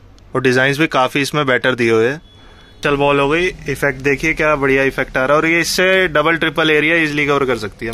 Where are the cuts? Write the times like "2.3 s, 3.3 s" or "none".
2.7 s